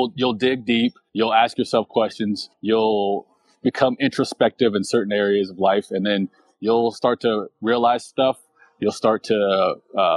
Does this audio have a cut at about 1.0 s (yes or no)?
yes